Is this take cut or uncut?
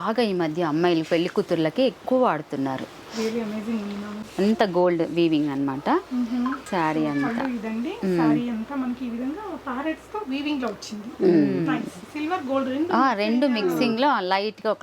cut